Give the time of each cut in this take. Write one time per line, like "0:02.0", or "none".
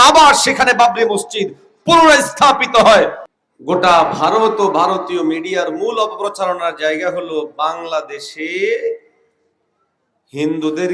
0:03.2